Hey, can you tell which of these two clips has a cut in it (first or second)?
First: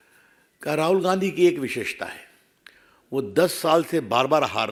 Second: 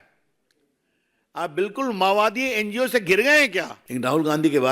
second